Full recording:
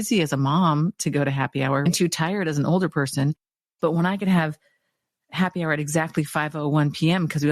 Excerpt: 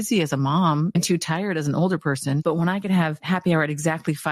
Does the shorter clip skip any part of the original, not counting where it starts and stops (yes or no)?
yes